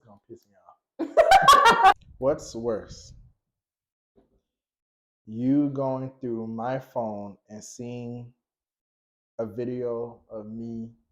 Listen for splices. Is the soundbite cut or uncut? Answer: cut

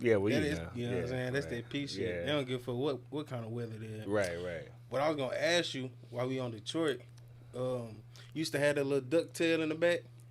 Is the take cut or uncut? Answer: uncut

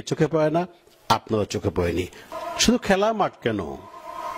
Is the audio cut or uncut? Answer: cut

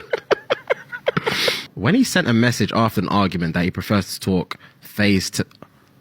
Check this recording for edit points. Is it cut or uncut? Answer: cut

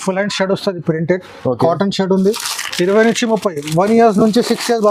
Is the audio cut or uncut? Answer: uncut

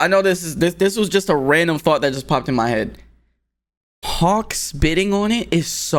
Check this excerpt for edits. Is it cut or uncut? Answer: uncut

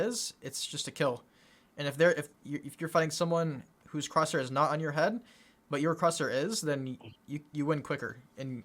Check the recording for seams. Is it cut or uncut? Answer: uncut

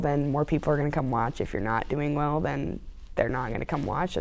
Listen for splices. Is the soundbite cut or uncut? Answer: uncut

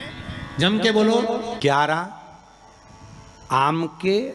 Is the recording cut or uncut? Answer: cut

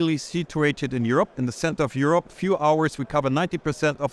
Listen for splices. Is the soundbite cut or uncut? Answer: uncut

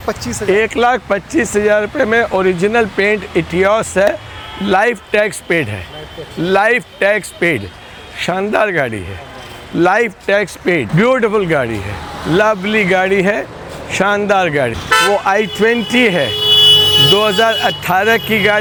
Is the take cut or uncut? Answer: uncut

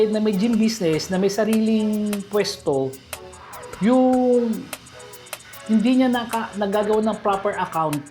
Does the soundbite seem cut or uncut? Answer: uncut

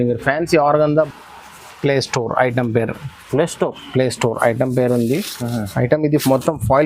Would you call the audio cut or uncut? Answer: cut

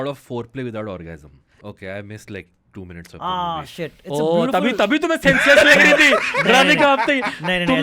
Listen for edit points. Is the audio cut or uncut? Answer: cut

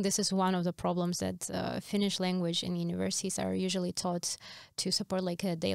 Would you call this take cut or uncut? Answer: uncut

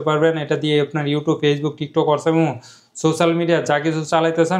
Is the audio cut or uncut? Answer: uncut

